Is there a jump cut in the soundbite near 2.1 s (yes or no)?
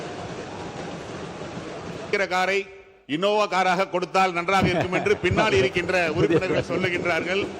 yes